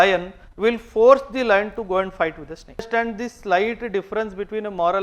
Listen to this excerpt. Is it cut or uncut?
cut